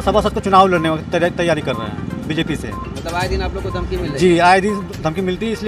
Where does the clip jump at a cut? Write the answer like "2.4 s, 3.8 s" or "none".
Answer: none